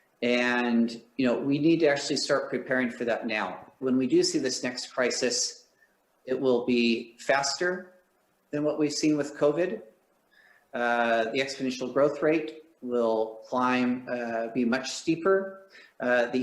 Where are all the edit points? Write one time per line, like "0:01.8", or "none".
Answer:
0:03.8